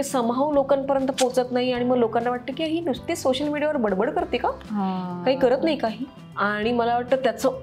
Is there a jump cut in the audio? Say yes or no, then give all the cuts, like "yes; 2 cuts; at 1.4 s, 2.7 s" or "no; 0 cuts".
no; 0 cuts